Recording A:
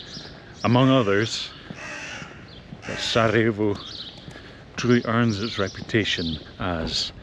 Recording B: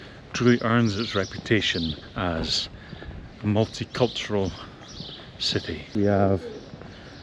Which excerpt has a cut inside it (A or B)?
B